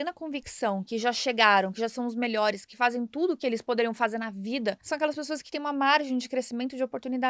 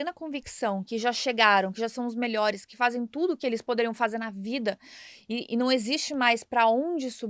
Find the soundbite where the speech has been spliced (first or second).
first